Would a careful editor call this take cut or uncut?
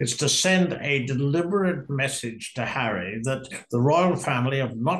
uncut